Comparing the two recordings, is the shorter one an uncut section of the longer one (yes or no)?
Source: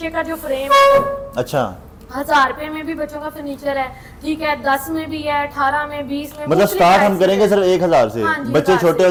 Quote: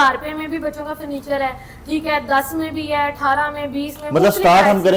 yes